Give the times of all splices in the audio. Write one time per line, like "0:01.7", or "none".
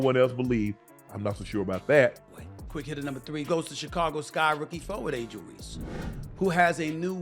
0:02.5